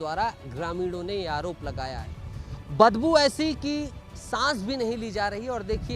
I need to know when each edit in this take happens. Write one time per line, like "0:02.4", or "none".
0:02.7